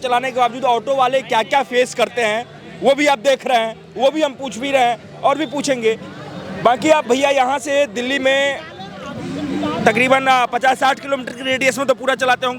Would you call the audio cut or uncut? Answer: uncut